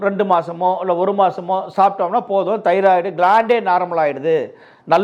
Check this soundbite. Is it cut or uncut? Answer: uncut